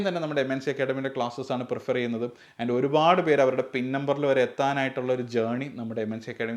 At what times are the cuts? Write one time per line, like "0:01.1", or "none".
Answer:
none